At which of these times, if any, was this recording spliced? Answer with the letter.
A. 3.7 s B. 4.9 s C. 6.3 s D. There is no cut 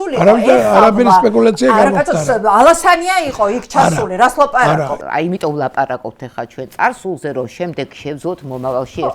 B